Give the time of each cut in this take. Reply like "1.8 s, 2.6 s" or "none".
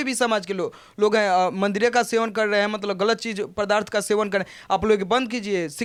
none